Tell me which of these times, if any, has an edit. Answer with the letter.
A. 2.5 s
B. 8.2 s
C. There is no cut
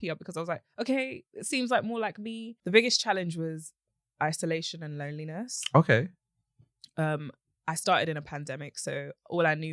A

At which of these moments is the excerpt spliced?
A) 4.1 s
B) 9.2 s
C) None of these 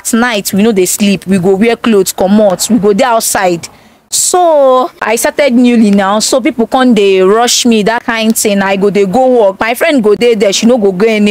C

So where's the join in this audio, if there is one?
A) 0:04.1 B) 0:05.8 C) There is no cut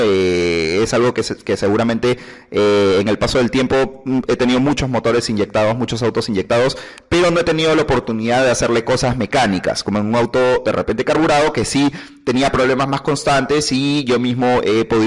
B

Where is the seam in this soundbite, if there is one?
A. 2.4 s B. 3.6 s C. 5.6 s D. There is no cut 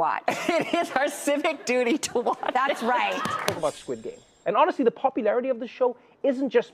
B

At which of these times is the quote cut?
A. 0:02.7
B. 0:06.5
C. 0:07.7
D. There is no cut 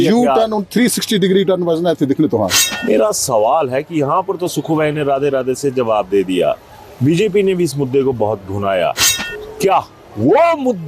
A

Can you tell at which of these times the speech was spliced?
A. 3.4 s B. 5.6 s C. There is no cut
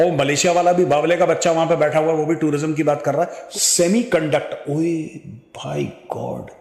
A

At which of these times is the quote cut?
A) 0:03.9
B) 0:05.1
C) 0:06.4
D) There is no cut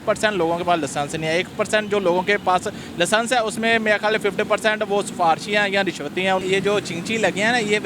C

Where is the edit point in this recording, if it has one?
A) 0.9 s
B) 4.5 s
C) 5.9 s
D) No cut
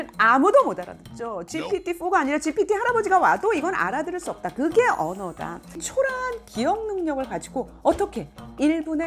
C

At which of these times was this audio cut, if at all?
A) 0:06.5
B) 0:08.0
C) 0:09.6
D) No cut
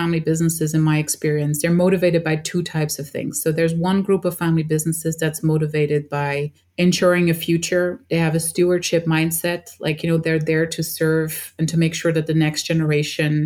D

